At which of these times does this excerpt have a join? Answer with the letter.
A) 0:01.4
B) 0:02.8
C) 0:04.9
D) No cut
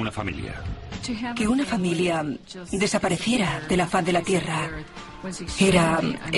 D